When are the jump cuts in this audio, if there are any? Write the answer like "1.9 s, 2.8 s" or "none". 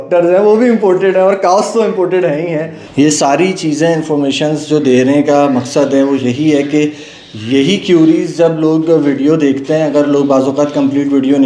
2.8 s